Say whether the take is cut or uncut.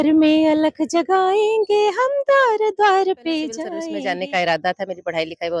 cut